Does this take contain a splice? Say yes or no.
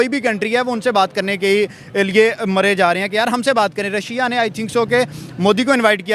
no